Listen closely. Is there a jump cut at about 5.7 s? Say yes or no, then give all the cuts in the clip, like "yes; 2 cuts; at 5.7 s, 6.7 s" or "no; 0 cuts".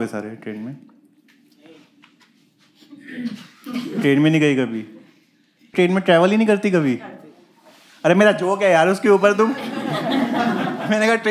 yes; 1 cut; at 5.7 s